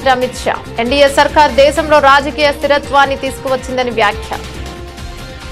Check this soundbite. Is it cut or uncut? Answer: cut